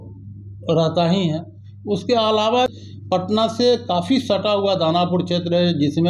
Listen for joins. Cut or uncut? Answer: cut